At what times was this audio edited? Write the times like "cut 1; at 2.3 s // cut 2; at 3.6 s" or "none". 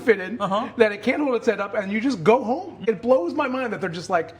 cut 1; at 2.8 s